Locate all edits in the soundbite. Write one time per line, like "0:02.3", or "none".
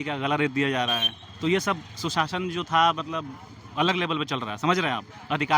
none